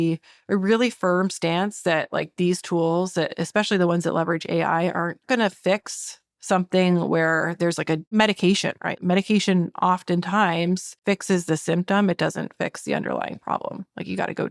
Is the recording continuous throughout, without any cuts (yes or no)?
no